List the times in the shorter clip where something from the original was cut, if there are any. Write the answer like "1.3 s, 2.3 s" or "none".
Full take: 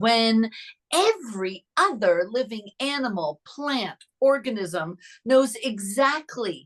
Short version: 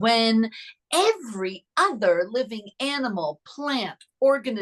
none